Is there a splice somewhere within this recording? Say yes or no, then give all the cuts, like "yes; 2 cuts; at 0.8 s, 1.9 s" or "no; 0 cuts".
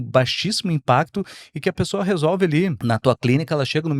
yes; 1 cut; at 2.8 s